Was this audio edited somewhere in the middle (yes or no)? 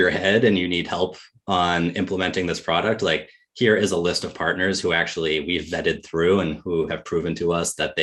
no